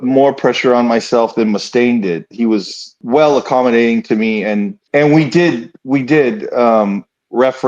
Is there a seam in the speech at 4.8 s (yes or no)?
yes